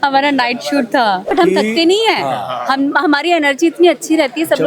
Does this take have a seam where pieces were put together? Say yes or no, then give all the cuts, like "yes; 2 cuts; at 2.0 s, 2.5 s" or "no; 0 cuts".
yes; 1 cut; at 1.3 s